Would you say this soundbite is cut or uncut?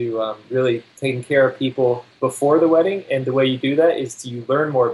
cut